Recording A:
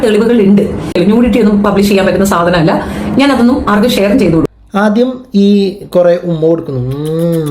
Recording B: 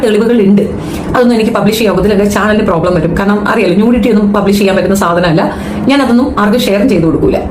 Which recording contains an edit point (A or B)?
A